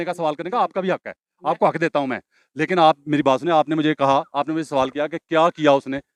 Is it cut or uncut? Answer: uncut